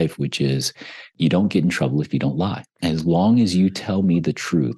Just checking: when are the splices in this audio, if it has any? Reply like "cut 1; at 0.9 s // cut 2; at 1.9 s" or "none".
cut 1; at 1.1 s // cut 2; at 2.7 s